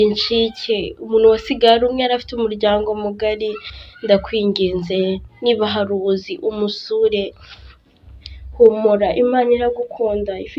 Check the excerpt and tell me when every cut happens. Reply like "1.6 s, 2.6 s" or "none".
8.2 s